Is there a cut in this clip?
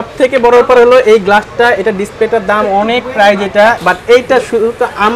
yes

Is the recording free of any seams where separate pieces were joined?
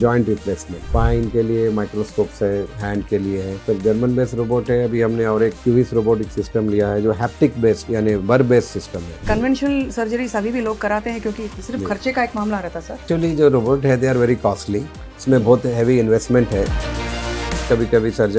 no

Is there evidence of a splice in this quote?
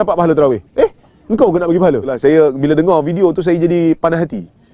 yes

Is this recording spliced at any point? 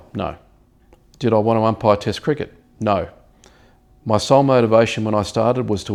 no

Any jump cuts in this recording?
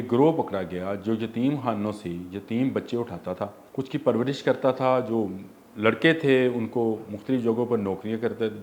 yes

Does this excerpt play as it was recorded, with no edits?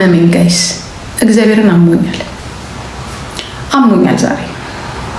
yes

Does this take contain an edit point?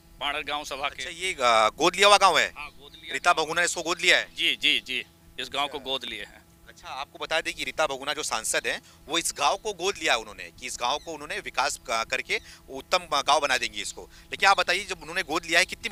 no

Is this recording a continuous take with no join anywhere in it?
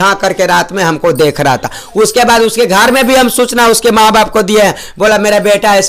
yes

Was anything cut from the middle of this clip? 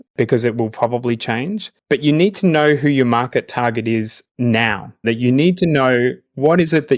yes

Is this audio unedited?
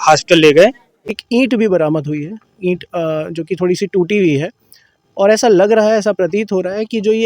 no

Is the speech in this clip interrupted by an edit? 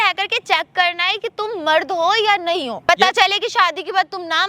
yes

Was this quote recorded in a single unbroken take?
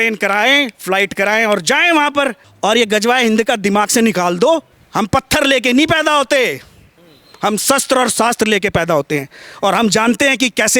no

